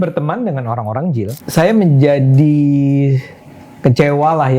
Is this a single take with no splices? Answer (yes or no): no